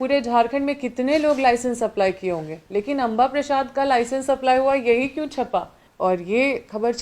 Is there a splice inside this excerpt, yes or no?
yes